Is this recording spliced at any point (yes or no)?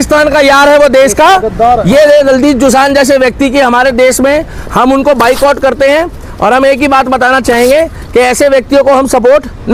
no